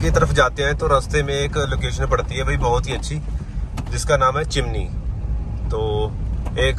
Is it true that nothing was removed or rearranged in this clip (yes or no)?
yes